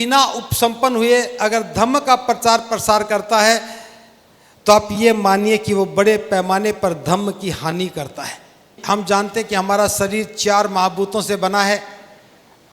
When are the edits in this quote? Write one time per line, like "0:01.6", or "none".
0:08.7